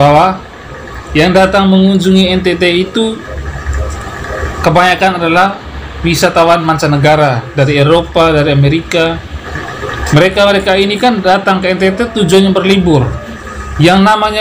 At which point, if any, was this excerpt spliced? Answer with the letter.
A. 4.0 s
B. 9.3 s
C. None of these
B